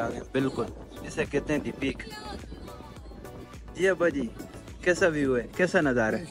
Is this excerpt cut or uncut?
uncut